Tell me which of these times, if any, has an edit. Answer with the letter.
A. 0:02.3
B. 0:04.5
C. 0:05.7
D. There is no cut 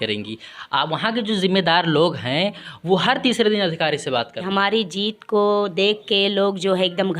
B